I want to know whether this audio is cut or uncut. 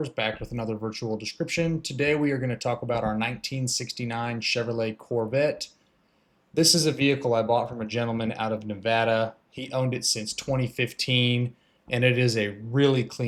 uncut